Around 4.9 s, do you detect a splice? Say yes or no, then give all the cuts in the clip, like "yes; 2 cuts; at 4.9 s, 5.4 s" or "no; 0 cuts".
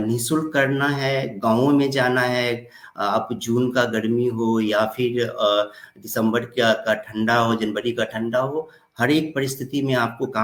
no; 0 cuts